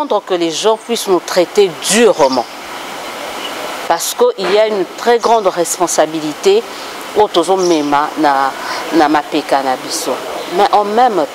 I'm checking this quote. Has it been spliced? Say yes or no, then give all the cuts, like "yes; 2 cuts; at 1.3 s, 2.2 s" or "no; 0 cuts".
no; 0 cuts